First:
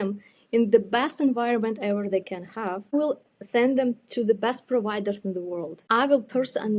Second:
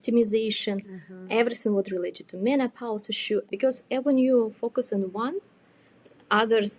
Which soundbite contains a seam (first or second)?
first